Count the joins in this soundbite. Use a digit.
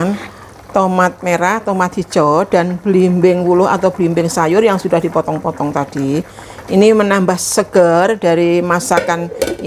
0